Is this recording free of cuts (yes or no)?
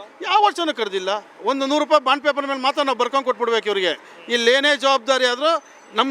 no